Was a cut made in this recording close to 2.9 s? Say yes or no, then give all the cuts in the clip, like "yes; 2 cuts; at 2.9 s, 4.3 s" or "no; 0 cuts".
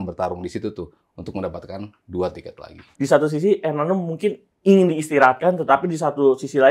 yes; 1 cut; at 2.9 s